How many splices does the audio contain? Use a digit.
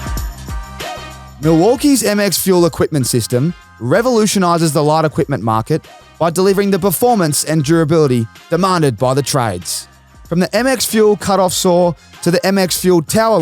1